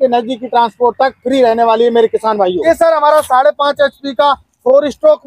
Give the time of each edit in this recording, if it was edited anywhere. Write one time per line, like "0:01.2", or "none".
0:02.6